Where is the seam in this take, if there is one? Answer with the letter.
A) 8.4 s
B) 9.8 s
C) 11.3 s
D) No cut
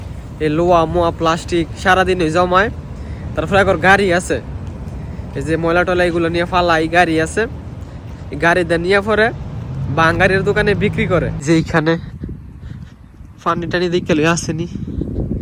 C